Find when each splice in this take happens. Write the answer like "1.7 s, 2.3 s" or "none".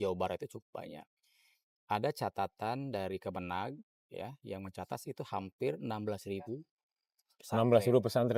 none